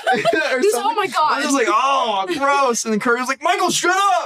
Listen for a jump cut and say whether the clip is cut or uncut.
uncut